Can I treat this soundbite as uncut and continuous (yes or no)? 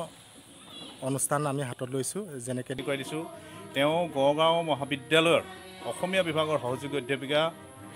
no